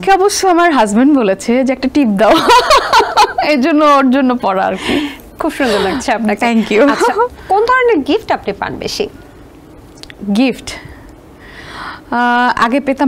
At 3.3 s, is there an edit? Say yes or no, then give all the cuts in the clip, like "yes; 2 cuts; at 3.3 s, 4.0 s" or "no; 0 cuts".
no; 0 cuts